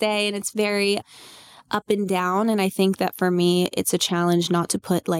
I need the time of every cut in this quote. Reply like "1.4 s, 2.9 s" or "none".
none